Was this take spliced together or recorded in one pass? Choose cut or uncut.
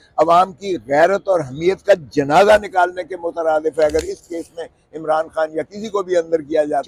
uncut